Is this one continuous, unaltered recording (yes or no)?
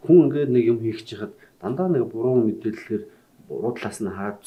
yes